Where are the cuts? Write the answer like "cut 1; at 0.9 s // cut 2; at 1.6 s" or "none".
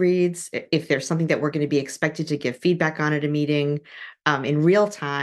none